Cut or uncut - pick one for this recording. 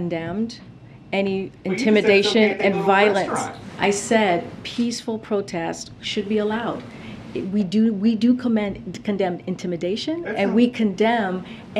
uncut